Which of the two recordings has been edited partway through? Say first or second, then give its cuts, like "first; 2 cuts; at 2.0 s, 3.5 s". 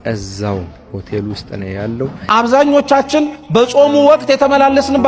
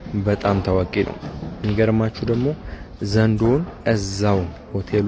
first; 1 cut; at 2.2 s